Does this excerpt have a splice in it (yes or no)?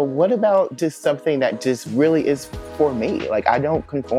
no